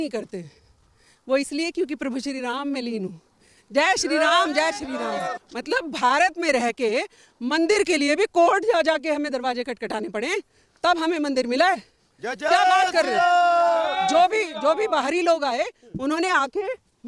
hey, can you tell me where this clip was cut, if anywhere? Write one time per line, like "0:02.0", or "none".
0:05.4